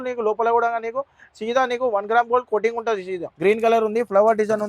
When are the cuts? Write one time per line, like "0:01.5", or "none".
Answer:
0:03.3